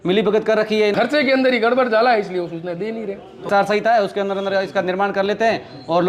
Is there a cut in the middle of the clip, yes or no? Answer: yes